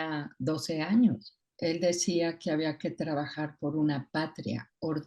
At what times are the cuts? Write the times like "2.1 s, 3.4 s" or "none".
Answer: 1.5 s